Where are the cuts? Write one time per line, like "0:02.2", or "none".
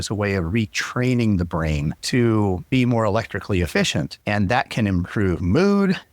0:02.0
0:02.7
0:04.2

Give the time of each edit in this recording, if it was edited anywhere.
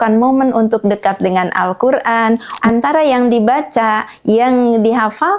0:02.5

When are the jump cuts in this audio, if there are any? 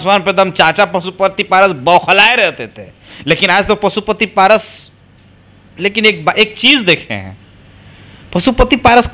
none

